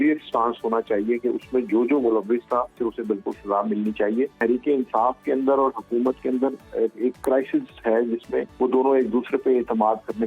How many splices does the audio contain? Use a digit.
3